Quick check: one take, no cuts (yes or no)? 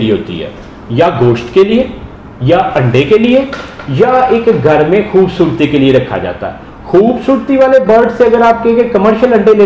yes